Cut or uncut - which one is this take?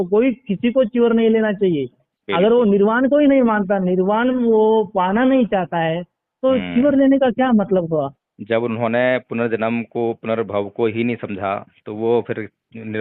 uncut